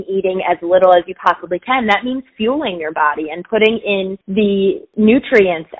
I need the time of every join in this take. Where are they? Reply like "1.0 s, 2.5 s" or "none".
4.2 s, 4.9 s